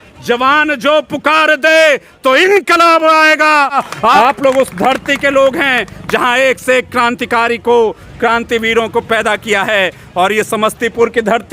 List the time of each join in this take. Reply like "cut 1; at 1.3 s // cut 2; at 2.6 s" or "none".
cut 1; at 3.8 s